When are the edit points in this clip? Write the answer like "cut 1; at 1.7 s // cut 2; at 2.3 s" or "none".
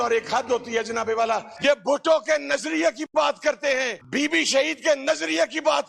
cut 1; at 1.5 s // cut 2; at 4.0 s